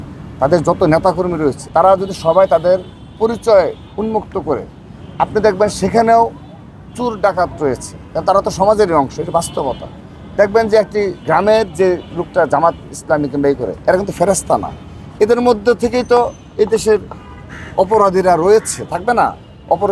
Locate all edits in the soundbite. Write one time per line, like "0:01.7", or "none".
0:01.6